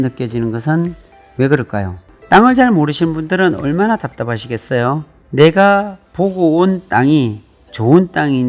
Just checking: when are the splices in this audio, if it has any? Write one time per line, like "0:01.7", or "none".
0:02.1